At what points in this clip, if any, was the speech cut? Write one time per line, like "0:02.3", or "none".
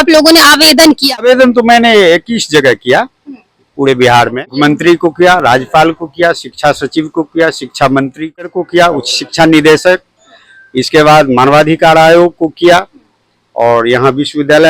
0:01.2
0:04.5
0:08.4